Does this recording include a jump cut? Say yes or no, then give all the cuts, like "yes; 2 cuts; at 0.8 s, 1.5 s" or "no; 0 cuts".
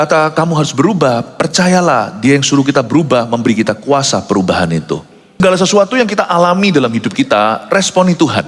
yes; 1 cut; at 5.4 s